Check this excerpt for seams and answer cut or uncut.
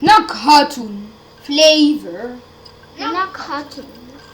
cut